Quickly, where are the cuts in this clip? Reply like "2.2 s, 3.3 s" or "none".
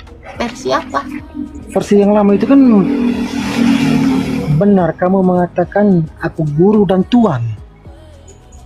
none